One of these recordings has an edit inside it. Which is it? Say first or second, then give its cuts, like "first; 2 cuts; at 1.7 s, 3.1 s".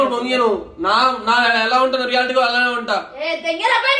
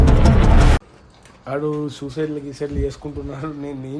second; 1 cut; at 1.0 s